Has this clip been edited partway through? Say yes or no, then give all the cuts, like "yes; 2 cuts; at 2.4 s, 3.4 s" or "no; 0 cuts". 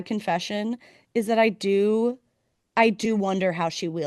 no; 0 cuts